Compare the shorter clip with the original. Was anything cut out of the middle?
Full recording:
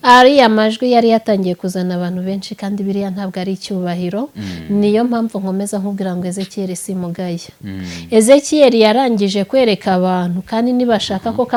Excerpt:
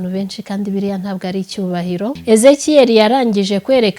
yes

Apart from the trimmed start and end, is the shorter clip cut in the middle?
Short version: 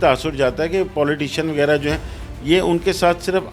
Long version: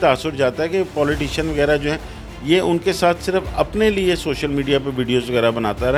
no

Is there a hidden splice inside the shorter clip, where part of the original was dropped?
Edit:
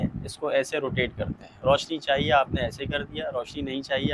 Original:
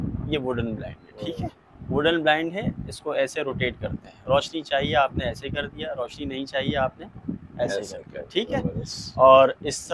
no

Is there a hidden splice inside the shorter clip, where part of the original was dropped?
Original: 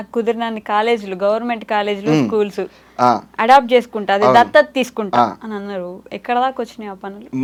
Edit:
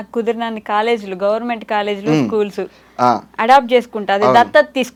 no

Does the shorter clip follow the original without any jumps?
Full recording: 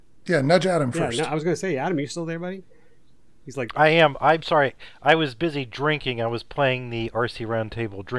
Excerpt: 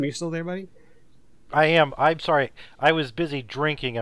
no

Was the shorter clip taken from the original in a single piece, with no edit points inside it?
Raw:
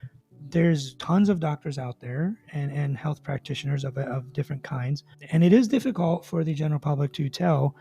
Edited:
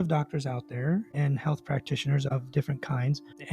no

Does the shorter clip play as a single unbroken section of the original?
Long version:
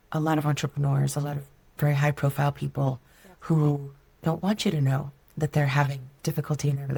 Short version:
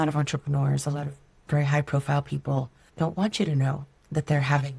no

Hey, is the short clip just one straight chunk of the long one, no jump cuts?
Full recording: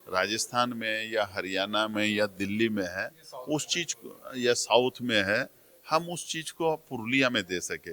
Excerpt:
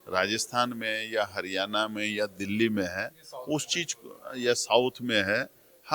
yes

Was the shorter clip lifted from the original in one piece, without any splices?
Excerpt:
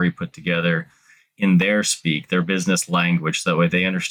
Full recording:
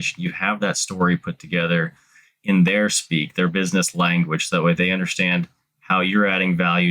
yes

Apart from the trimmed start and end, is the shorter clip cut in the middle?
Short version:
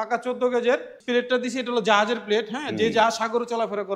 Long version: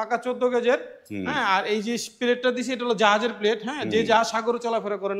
yes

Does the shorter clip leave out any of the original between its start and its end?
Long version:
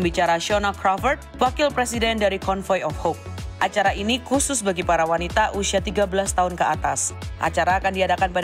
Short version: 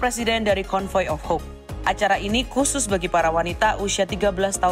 no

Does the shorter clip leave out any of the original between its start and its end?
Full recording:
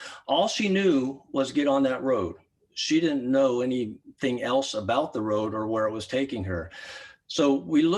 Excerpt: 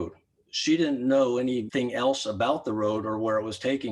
yes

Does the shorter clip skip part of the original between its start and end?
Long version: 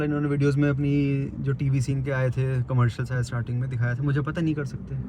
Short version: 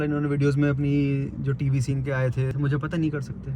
yes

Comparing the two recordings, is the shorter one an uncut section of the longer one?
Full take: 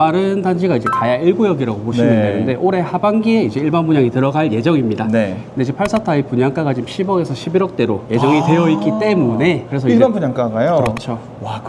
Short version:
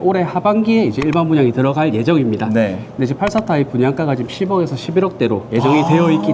yes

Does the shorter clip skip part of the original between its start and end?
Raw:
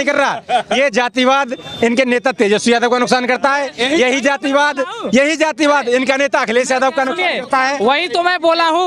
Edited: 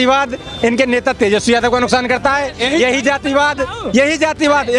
no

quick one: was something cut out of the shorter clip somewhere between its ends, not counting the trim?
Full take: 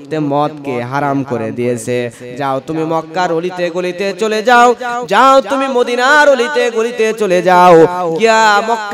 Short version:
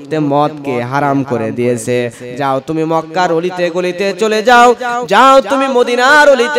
no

